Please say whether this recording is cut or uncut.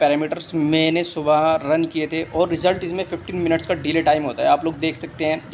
uncut